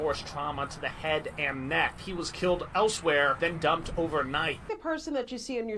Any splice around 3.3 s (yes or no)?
yes